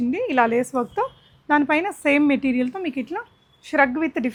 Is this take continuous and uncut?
yes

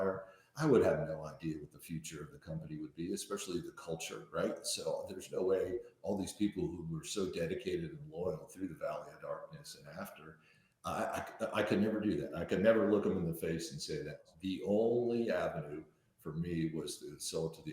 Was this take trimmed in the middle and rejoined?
yes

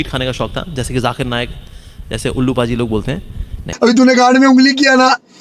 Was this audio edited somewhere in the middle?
yes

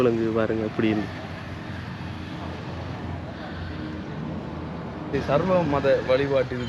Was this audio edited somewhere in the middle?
yes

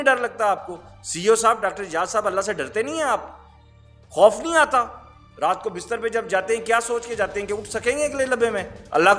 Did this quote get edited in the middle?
no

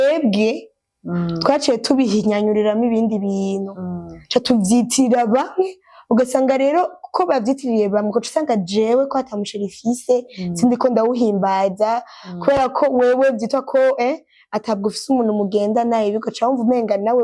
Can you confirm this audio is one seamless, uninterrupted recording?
yes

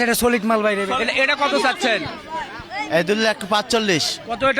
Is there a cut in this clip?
yes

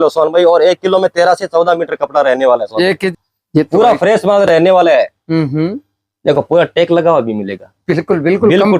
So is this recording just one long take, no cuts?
no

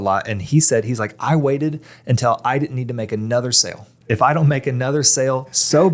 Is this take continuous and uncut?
no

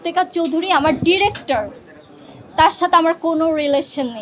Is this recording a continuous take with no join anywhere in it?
yes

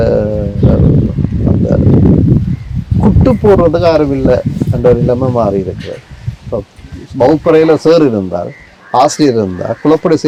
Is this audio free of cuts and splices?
yes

